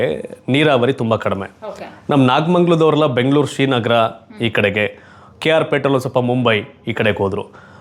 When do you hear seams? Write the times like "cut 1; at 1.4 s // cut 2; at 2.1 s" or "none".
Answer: none